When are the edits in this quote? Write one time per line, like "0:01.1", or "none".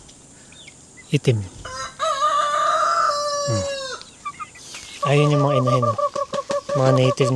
0:05.0

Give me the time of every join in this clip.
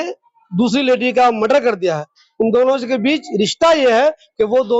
none

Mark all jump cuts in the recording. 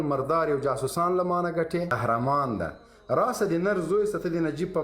0:01.9

